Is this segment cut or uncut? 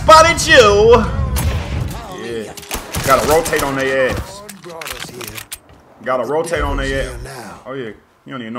cut